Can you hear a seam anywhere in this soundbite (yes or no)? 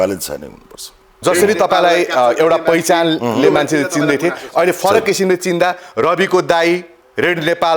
yes